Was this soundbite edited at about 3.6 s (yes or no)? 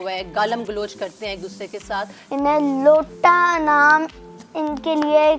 no